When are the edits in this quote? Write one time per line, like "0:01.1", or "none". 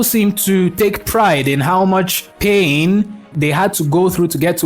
0:03.2